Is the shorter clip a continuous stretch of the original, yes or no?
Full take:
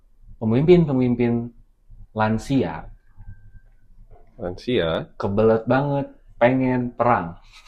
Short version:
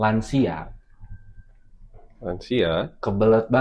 yes